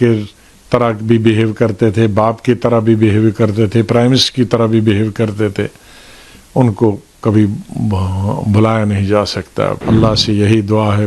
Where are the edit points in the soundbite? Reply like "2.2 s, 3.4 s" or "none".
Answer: 9.8 s

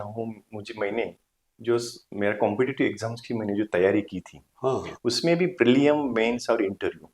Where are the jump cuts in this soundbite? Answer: none

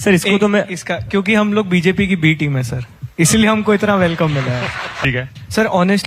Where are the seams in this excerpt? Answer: 5.0 s

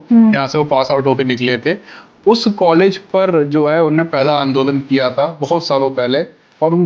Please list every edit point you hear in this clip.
none

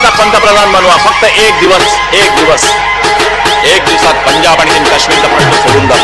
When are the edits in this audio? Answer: none

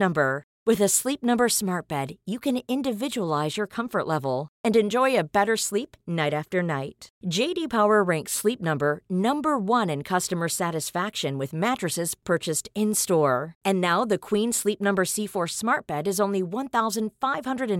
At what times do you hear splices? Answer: none

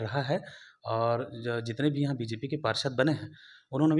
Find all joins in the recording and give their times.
none

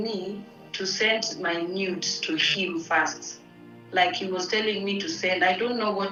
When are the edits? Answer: none

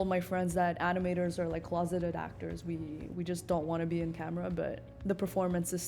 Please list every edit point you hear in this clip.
4.9 s

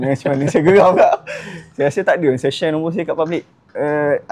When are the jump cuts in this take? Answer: none

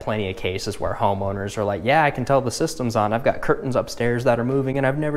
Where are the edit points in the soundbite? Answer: none

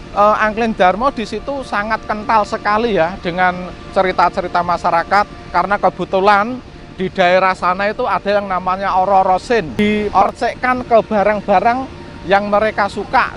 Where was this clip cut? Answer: 10.0 s

